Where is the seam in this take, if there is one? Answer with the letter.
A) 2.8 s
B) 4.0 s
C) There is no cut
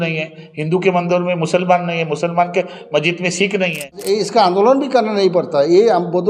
B